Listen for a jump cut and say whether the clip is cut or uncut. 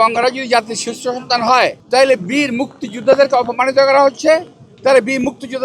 cut